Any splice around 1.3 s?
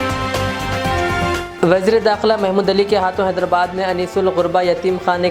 yes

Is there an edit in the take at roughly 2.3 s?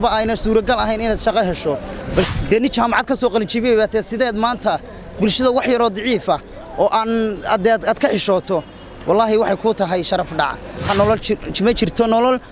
yes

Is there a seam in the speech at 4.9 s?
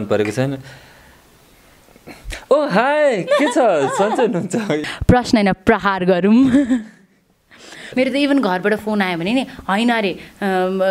yes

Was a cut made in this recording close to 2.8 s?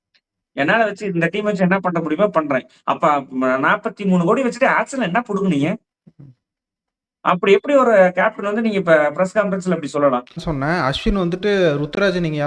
no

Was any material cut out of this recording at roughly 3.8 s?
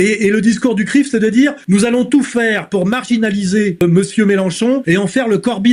yes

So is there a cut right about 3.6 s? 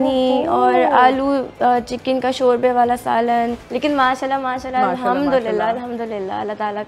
yes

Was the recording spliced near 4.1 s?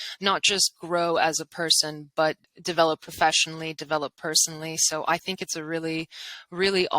no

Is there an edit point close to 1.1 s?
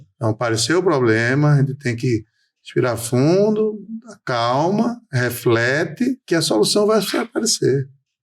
no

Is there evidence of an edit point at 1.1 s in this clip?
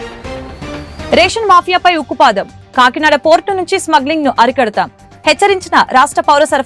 no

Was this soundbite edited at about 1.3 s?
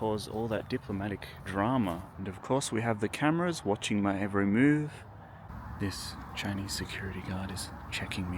yes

